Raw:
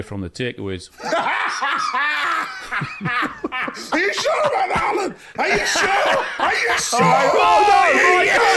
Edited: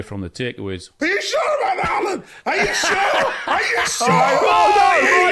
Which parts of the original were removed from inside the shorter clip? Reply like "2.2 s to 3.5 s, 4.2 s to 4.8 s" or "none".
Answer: 0.9 s to 3.8 s